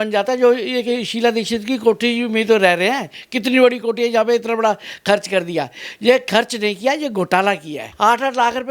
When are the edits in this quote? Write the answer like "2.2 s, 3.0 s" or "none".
7.8 s